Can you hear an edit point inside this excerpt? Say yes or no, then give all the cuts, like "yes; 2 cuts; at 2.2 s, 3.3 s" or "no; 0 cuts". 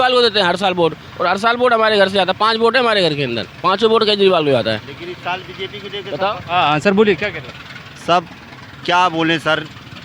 no; 0 cuts